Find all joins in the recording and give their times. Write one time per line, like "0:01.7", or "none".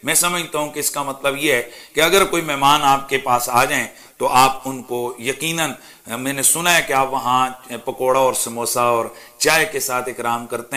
none